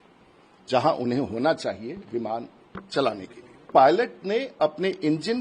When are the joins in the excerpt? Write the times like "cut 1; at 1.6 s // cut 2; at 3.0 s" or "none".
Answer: cut 1; at 3.7 s